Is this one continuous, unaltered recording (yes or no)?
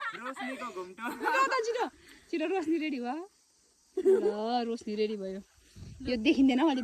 yes